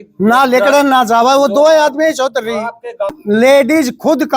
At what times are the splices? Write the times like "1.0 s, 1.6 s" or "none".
3.2 s